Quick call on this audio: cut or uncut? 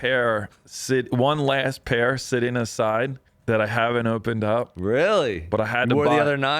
cut